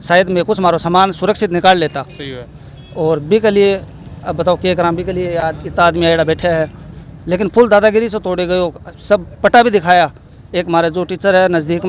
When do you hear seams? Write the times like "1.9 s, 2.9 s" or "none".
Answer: none